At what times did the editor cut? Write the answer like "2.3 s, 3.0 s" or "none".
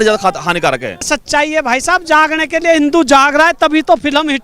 1.2 s